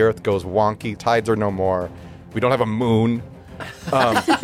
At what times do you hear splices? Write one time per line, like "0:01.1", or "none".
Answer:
0:00.9